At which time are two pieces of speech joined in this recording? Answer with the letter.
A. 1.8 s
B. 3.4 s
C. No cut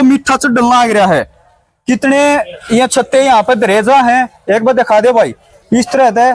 C